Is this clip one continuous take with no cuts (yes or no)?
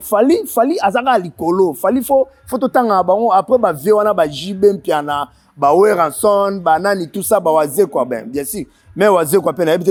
yes